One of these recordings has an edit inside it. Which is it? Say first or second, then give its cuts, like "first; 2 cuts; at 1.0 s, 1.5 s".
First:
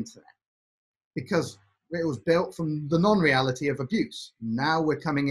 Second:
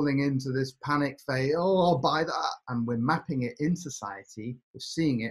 second; 1 cut; at 2.6 s